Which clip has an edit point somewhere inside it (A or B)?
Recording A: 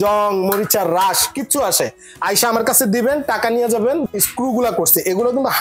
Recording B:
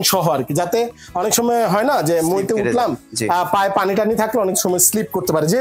A